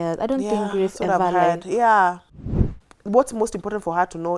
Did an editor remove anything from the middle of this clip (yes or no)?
yes